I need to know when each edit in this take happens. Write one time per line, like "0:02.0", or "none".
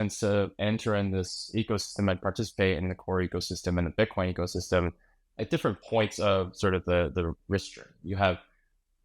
0:05.4